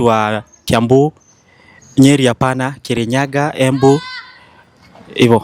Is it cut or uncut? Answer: uncut